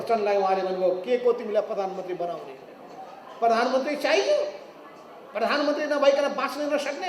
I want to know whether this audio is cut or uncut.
uncut